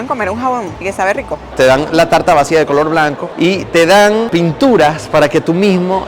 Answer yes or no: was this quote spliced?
yes